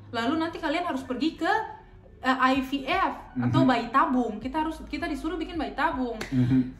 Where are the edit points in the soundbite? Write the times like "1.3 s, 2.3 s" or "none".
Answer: none